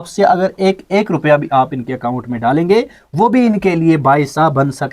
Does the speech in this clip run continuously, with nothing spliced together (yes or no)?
yes